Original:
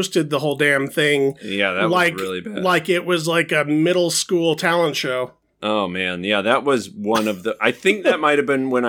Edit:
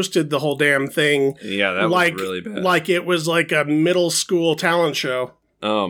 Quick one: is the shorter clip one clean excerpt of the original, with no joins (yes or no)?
yes